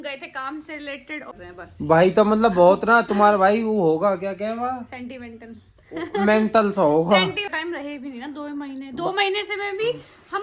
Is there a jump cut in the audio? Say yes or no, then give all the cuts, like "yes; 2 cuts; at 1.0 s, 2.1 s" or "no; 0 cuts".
yes; 2 cuts; at 1.3 s, 7.5 s